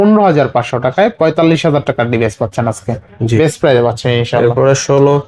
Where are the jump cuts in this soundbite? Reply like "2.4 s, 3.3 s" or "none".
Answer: none